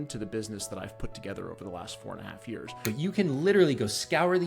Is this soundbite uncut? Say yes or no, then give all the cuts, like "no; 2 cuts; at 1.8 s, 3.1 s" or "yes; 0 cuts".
no; 1 cut; at 2.8 s